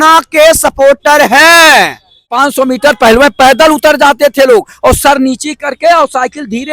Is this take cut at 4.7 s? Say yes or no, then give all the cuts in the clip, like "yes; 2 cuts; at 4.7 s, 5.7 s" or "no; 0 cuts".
no; 1 cut; at 2.3 s